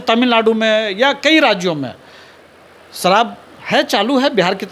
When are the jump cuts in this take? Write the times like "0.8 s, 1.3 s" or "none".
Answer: none